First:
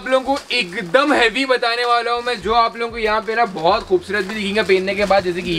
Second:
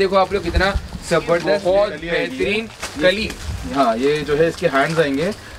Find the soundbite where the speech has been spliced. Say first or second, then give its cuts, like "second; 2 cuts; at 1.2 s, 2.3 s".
second; 1 cut; at 1.5 s